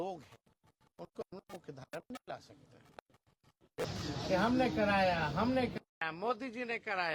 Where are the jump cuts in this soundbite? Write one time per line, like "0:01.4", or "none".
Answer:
0:03.9